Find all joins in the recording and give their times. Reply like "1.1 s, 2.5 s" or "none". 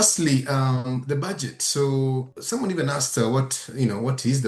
2.3 s

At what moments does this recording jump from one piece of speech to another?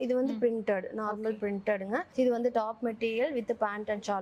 none

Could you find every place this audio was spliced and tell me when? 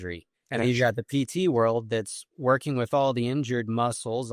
none

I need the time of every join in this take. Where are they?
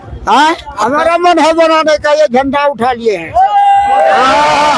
none

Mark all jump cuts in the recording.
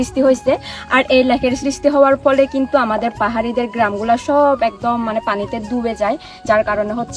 none

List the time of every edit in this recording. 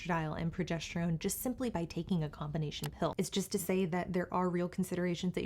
3.1 s

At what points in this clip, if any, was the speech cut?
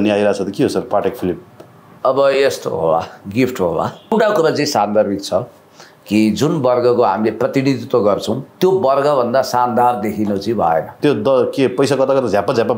4.1 s, 10.9 s

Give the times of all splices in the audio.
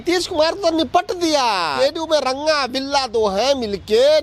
1.7 s

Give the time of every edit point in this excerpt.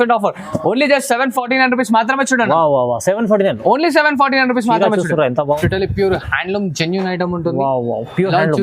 5.6 s

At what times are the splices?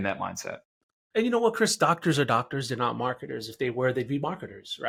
none

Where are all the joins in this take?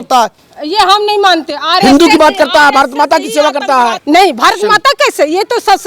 4.0 s

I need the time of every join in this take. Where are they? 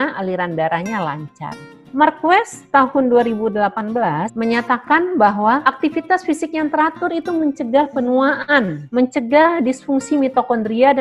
4.3 s, 5.6 s

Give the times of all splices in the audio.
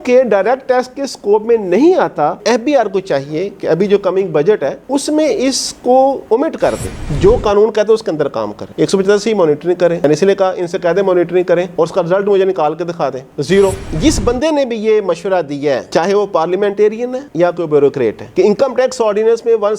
2.4 s, 7.0 s, 13.8 s

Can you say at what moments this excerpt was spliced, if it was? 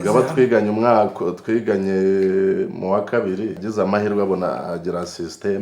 3.6 s

